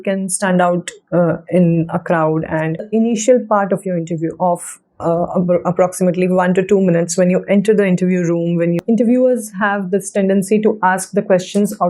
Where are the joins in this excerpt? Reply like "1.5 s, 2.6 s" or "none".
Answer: 2.9 s, 8.8 s